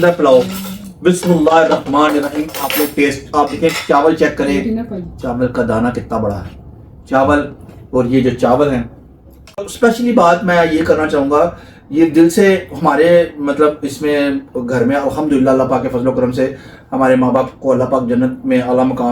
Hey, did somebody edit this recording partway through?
yes; 1 cut; at 9.7 s

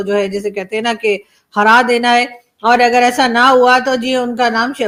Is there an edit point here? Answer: no; 0 cuts

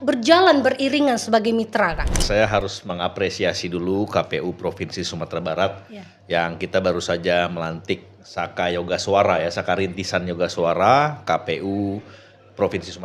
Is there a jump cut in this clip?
yes; 1 cut; at 2.2 s

